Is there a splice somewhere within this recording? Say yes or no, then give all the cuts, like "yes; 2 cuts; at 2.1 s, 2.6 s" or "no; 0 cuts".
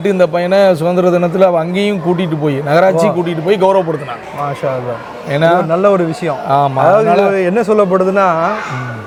no; 0 cuts